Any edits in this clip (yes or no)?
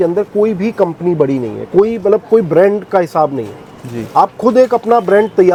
no